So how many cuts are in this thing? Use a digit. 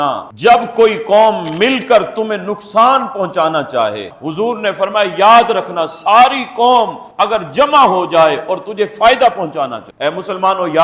2